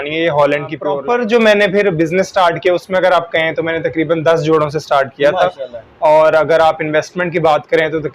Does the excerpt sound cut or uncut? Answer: cut